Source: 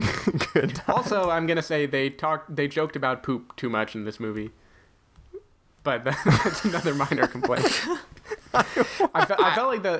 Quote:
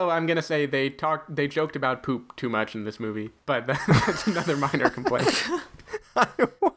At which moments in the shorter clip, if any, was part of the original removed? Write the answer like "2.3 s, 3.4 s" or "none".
3.3 s